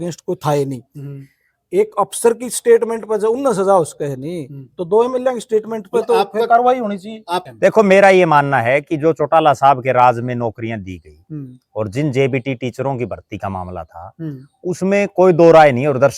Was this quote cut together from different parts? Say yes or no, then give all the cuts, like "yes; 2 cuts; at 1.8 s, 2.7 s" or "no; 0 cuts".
yes; 1 cut; at 7.5 s